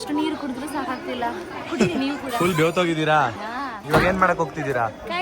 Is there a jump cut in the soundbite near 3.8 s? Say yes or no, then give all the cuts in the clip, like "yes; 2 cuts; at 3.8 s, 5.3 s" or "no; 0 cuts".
yes; 1 cut; at 3.8 s